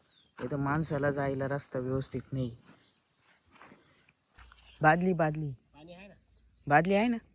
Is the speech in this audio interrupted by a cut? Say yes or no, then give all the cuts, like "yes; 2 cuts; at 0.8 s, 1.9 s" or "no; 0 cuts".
yes; 1 cut; at 4.2 s